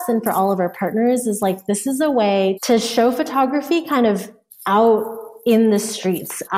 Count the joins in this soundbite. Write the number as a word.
one